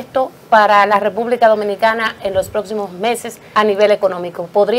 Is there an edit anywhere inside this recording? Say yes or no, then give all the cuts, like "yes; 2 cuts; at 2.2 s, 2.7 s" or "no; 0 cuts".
yes; 1 cut; at 3.3 s